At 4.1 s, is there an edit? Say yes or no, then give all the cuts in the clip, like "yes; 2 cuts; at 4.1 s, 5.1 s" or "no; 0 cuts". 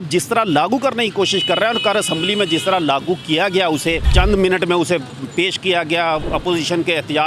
yes; 1 cut; at 4.1 s